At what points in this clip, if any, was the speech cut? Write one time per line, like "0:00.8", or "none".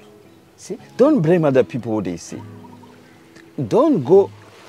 none